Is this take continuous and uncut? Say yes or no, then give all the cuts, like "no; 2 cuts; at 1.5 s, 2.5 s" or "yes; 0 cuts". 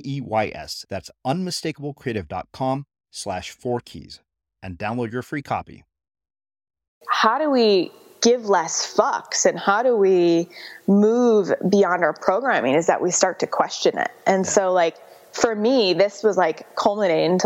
no; 1 cut; at 7.0 s